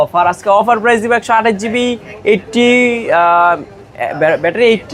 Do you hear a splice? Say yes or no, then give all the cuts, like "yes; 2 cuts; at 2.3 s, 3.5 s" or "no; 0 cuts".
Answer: no; 0 cuts